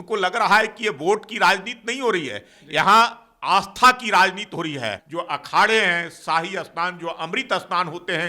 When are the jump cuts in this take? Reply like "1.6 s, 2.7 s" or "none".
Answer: 5.0 s